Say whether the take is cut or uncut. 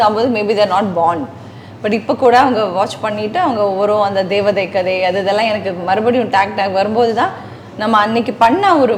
uncut